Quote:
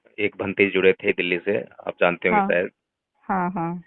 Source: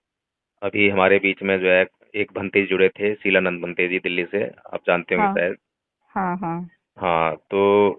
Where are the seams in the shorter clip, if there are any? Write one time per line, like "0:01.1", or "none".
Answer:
0:01.1